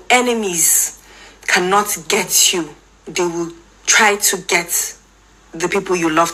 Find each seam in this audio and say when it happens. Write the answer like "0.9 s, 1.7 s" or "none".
none